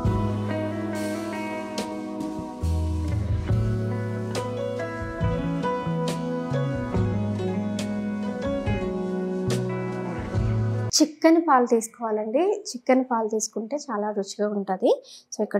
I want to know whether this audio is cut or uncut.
uncut